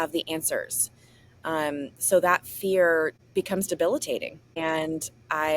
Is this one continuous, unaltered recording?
no; 2 cuts; at 3.2 s, 4.4 s

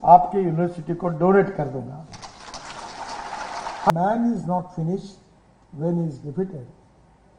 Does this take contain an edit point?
yes; 1 cut; at 3.9 s

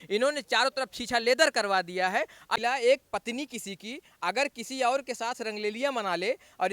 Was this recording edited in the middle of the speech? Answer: yes; 1 cut; at 2.6 s

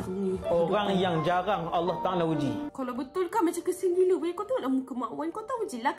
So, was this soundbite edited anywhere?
yes; 1 cut; at 2.7 s

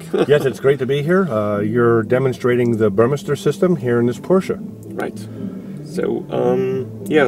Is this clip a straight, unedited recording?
yes; 0 cuts

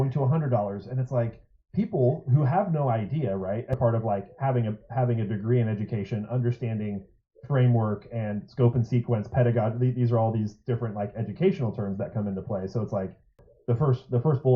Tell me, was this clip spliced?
yes; 2 cuts; at 3.7 s, 13.5 s

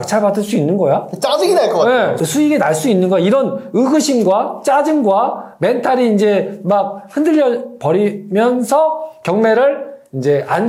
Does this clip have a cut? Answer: no; 0 cuts

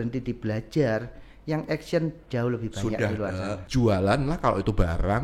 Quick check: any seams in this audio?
yes; 1 cut; at 3.6 s

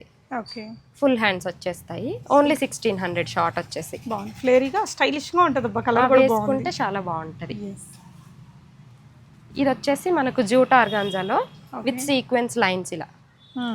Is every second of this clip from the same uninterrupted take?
yes; 0 cuts

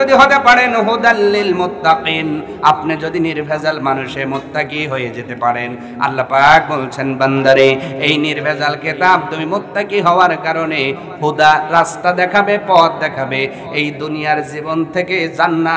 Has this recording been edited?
no; 0 cuts

